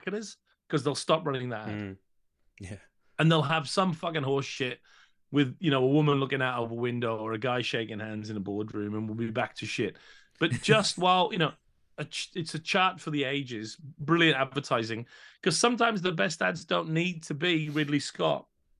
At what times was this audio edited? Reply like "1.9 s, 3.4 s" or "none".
none